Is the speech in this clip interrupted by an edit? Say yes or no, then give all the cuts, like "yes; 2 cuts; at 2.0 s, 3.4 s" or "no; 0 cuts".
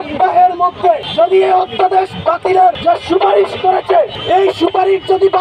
yes; 3 cuts; at 1.1 s, 2.8 s, 4.2 s